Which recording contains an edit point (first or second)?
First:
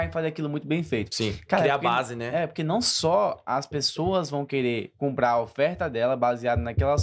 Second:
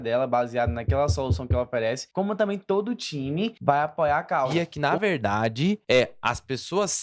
second